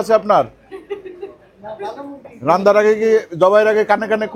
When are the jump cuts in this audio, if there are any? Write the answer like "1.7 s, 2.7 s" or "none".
none